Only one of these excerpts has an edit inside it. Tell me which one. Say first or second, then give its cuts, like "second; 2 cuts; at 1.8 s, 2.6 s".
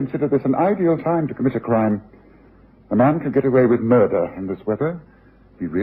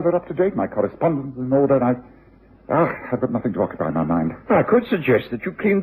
first; 1 cut; at 0.9 s